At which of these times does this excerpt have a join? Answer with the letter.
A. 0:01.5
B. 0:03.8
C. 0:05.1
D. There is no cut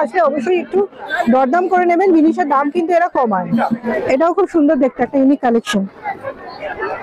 D